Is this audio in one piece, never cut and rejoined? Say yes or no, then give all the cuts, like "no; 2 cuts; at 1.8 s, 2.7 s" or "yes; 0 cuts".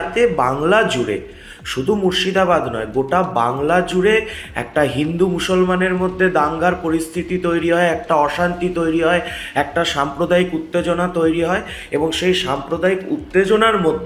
yes; 0 cuts